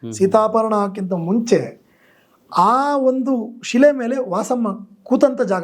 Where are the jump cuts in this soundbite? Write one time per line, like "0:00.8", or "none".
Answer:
none